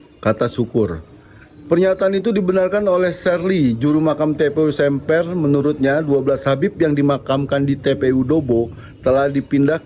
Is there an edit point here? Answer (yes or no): no